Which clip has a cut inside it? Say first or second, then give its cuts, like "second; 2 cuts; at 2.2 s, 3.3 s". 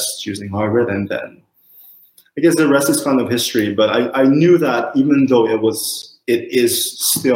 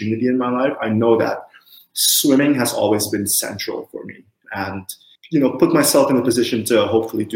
second; 1 cut; at 4.4 s